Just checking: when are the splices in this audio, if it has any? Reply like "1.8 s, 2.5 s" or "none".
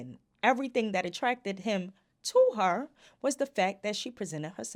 none